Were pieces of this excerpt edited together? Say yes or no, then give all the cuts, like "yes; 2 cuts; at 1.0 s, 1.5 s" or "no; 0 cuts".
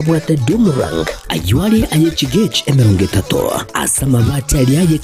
no; 0 cuts